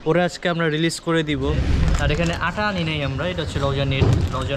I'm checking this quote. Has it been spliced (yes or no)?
yes